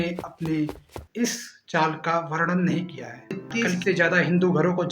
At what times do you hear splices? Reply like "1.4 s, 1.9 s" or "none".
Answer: 3.4 s

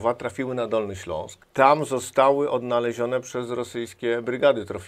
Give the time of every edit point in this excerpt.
1.4 s

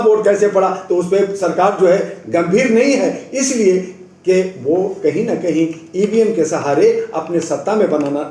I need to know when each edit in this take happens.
none

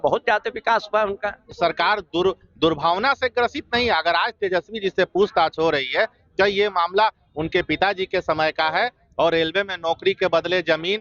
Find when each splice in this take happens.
1.5 s

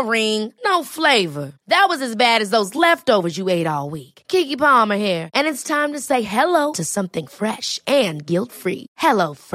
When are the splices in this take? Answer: none

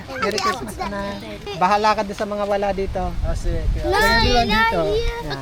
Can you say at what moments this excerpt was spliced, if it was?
1.5 s

